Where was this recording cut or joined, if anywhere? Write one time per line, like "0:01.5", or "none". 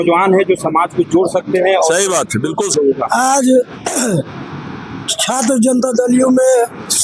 0:02.7